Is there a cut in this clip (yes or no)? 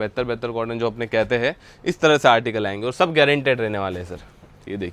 no